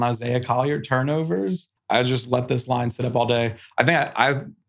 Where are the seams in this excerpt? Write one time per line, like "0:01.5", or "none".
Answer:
0:01.7